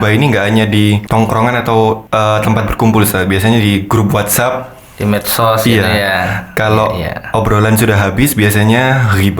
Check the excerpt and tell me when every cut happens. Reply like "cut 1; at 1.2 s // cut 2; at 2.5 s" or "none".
cut 1; at 1.0 s // cut 2; at 2.0 s